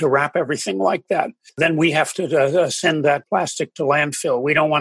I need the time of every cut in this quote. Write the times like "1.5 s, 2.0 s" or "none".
1.6 s, 3.2 s